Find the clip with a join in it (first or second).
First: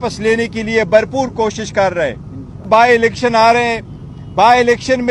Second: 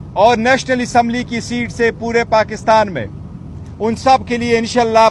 first